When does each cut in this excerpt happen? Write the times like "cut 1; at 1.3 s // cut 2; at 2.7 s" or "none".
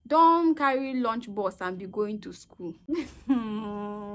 cut 1; at 2.9 s